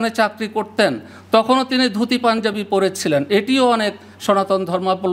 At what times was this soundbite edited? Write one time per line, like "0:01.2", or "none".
none